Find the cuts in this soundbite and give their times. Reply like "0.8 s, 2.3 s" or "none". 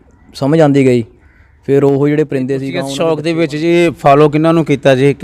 2.8 s

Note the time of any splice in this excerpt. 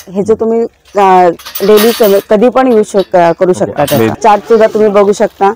4.2 s

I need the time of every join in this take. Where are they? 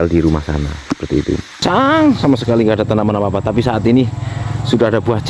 1.9 s

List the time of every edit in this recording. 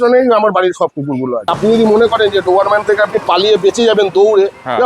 1.5 s

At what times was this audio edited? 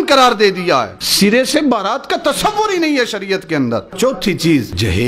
1.0 s, 3.9 s

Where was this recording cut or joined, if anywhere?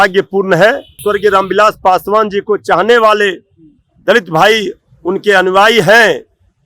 1.0 s

